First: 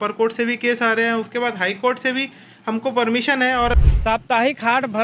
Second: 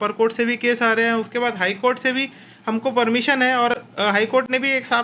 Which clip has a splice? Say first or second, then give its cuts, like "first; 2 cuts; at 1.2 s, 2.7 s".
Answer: first; 1 cut; at 3.9 s